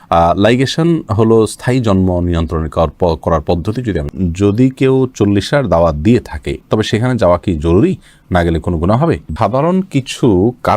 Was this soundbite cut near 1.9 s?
no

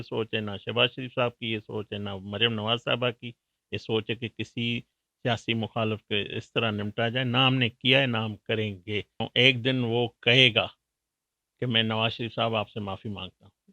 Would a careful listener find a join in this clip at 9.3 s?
yes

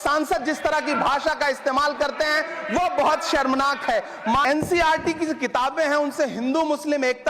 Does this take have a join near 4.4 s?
yes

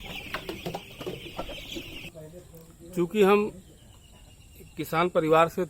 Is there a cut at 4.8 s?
no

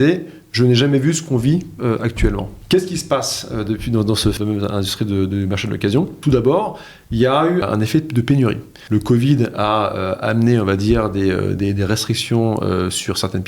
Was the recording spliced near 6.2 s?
yes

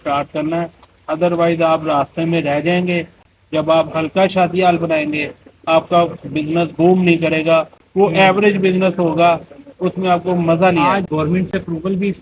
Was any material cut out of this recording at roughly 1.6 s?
no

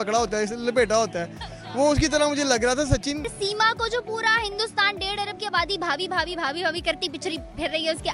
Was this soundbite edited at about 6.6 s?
no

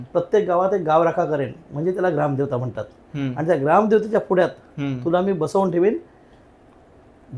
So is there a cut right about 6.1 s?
no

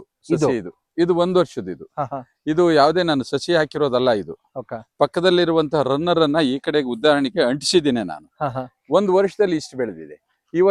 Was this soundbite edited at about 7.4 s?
no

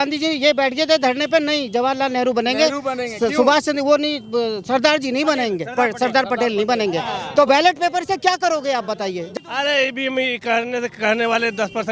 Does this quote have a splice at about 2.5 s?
no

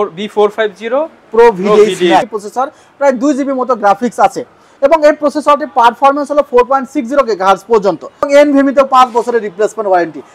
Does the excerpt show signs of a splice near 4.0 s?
no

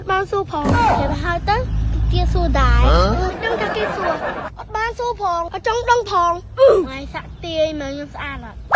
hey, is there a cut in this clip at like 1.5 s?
no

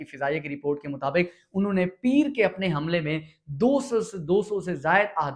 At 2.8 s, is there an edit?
no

